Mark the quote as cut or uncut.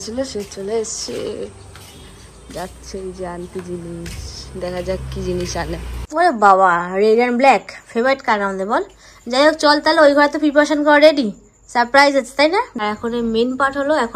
cut